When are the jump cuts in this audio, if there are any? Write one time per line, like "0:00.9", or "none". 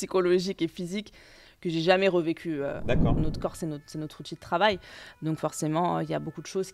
0:03.2